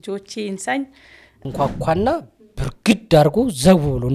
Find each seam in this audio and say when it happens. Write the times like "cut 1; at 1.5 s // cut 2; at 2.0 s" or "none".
cut 1; at 1.4 s